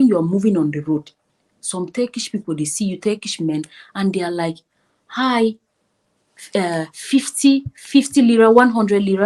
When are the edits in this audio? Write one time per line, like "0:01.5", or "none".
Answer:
none